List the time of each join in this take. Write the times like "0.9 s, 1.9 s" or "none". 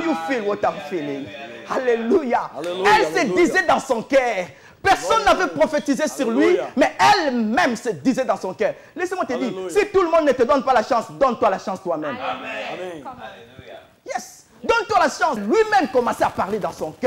15.4 s